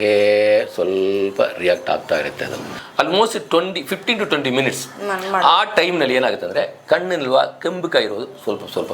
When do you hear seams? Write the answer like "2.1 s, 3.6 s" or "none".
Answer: 2.8 s